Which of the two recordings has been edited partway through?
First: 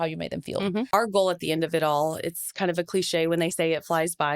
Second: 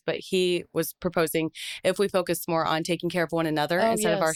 first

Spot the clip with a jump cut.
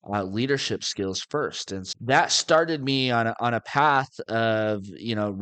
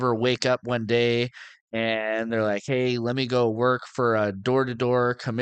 first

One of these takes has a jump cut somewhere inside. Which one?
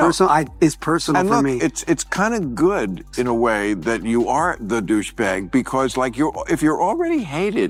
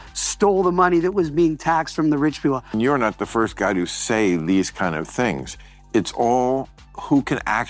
second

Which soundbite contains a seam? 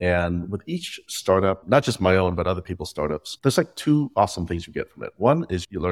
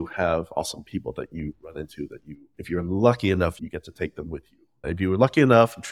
first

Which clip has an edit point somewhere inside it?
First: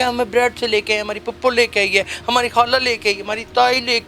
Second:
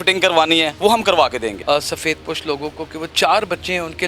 second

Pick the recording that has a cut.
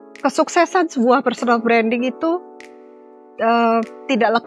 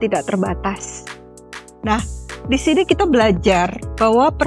second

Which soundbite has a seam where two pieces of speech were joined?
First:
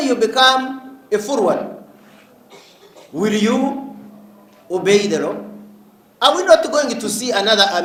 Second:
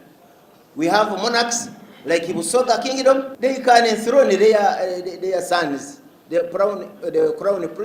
second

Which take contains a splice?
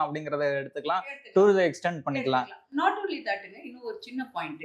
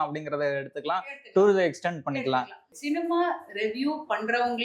second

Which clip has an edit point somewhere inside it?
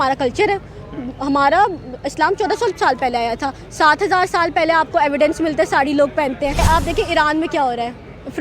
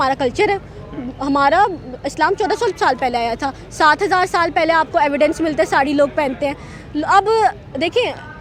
first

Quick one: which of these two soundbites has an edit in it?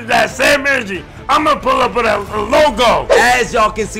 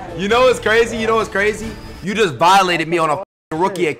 first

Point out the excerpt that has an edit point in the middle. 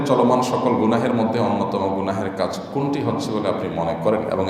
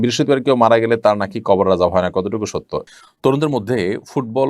second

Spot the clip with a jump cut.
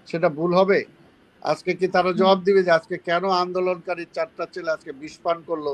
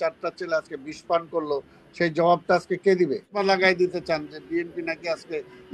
second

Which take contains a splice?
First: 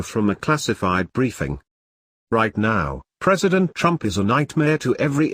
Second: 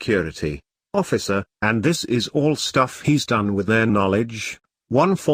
first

